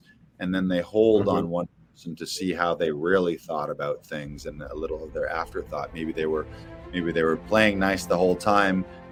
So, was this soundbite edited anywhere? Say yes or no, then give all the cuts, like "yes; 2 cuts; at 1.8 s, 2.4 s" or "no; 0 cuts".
no; 0 cuts